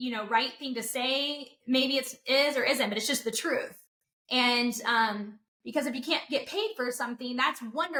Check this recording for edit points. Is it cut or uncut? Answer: uncut